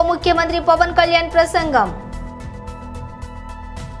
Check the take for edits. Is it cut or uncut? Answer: uncut